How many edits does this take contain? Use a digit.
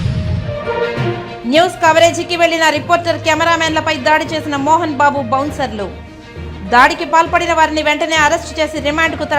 1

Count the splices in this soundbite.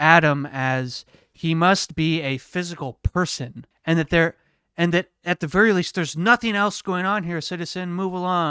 1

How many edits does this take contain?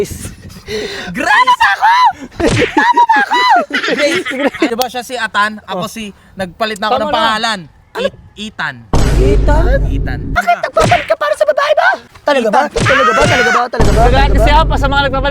3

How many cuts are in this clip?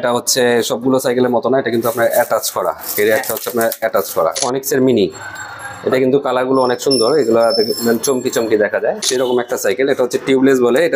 2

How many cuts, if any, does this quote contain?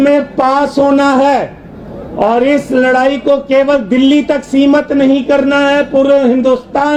0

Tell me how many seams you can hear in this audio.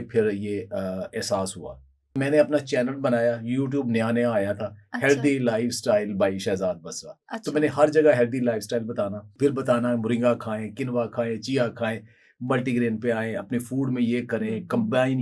1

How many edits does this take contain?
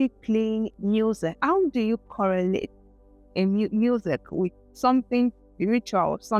1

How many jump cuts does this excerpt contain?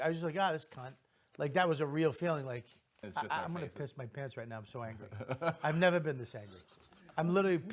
1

